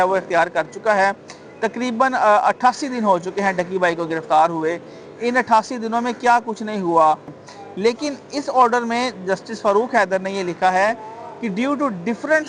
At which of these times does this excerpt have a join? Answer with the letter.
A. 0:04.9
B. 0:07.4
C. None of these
B